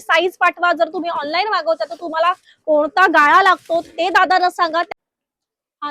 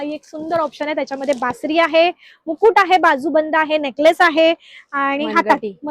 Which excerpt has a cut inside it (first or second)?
first